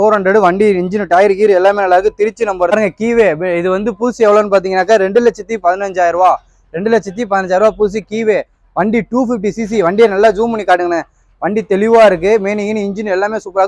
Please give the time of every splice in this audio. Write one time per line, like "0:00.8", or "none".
0:02.7